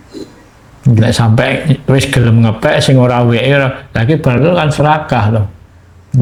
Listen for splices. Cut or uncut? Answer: uncut